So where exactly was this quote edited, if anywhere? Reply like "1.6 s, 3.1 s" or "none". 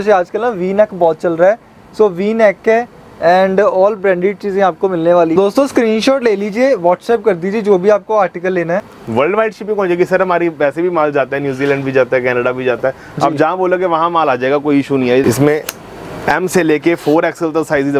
5.3 s, 9.0 s, 15.2 s